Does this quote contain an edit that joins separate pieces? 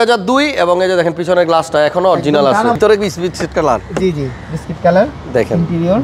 yes; 1 cut; at 2.8 s

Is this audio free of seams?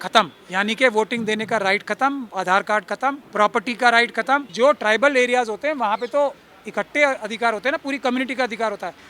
no; 2 cuts; at 3.2 s, 4.5 s

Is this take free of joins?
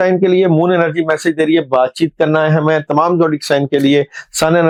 yes; 0 cuts

